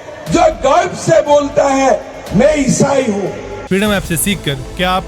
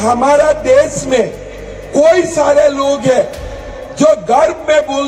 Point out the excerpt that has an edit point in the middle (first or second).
first